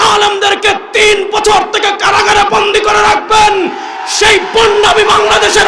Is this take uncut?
yes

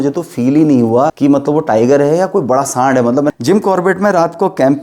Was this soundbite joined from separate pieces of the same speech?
yes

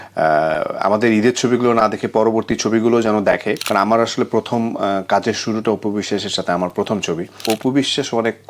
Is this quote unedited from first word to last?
no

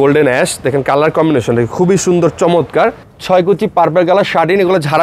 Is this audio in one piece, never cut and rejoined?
no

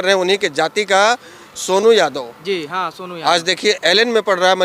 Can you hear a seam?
no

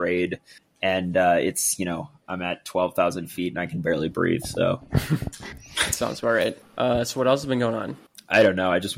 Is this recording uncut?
no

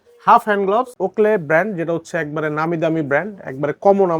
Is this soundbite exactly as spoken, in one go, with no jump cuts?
no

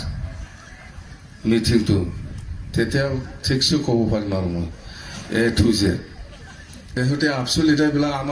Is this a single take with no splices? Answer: no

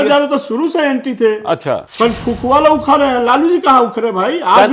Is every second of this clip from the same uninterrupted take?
no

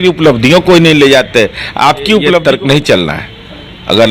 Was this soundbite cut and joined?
yes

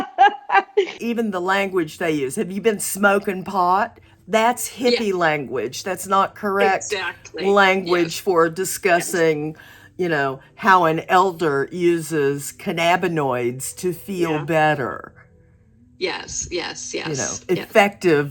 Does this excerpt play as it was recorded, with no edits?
no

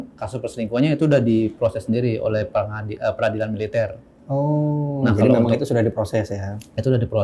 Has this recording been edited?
no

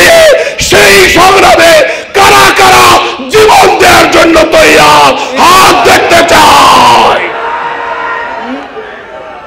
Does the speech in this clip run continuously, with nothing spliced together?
yes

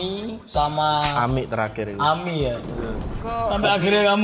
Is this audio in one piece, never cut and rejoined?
no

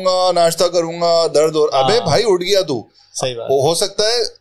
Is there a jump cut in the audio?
no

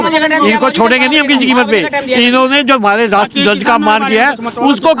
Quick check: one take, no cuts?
yes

